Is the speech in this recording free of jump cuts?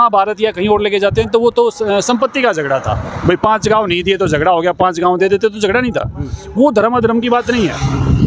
yes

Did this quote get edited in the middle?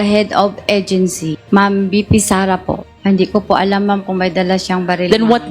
yes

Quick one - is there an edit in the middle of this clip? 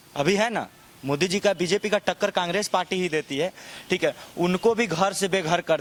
no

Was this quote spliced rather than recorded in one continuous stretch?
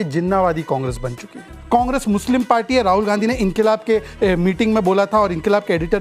yes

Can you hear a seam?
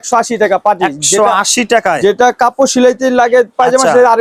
no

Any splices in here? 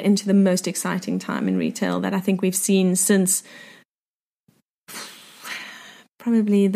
no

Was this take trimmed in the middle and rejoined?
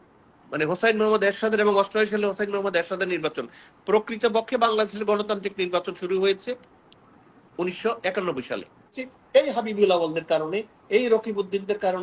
yes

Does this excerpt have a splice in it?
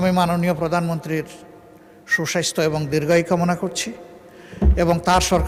no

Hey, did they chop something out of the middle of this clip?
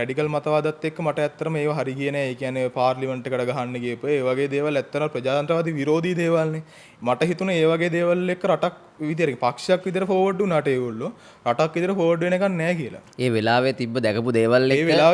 no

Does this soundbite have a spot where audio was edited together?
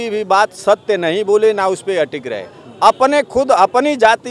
no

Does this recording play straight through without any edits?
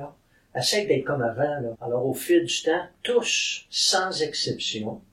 no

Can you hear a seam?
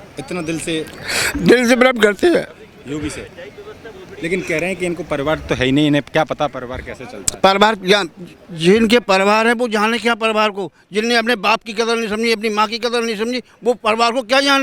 no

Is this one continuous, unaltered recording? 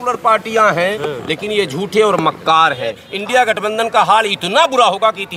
no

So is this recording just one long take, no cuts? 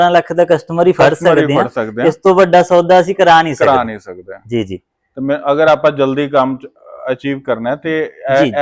yes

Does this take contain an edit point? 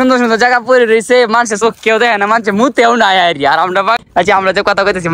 yes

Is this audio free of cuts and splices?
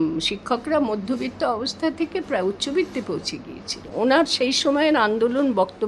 no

